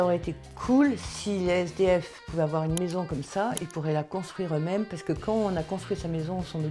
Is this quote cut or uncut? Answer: uncut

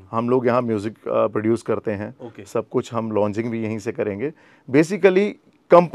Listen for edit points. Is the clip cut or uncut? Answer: uncut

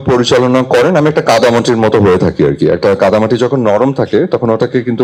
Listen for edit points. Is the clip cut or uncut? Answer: uncut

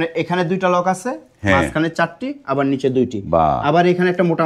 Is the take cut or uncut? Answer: uncut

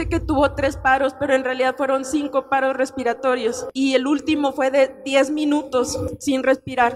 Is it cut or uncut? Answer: cut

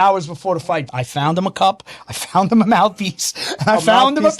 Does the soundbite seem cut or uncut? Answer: cut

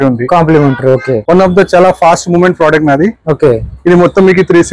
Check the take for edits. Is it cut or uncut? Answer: cut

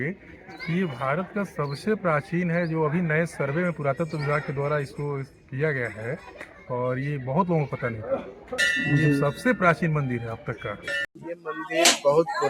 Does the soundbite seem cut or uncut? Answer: cut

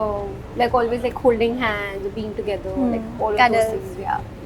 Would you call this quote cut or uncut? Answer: uncut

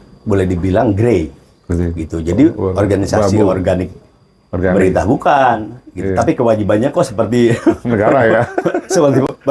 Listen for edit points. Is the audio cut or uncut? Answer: uncut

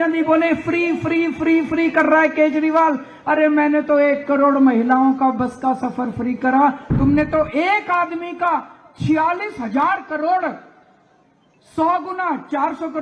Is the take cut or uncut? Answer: uncut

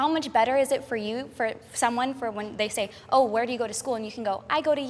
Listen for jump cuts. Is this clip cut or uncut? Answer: uncut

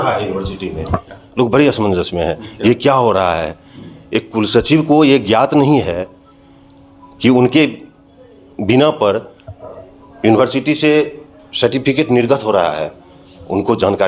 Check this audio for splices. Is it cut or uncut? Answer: uncut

